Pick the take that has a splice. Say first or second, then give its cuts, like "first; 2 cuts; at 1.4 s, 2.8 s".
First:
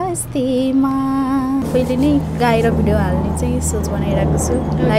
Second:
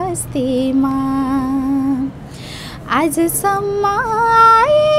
first; 1 cut; at 1.6 s